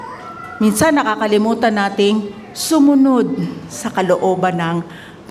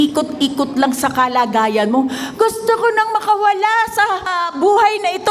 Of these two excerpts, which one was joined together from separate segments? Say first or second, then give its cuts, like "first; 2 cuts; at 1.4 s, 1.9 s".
second; 1 cut; at 4.4 s